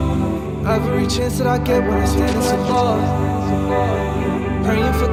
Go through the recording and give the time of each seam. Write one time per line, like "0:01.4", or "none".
none